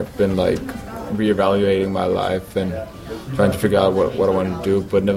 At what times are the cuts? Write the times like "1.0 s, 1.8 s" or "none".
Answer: none